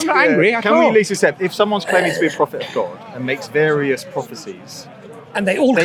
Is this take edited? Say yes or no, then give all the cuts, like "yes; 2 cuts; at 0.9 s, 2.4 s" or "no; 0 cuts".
no; 0 cuts